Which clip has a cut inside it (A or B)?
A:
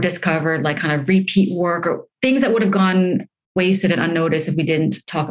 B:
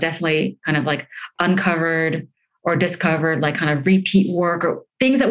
A